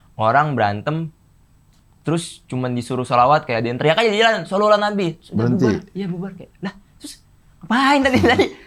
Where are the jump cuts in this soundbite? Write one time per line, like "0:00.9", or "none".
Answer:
none